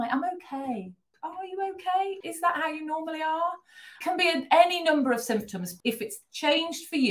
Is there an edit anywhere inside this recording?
yes; 4 cuts; at 1.1 s, 2.2 s, 4.0 s, 5.7 s

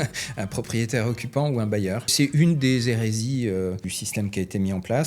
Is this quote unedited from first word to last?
no; 2 cuts; at 2.1 s, 4.0 s

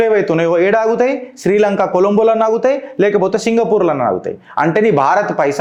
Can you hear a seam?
no; 0 cuts

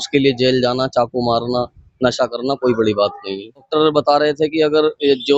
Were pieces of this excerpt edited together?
yes; 1 cut; at 3.7 s

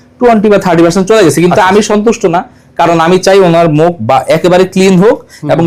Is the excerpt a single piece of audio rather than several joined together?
yes; 0 cuts

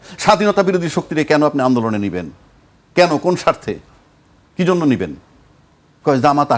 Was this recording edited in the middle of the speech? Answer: no; 0 cuts

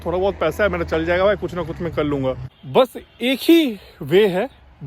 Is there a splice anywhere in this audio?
yes; 1 cut; at 2.5 s

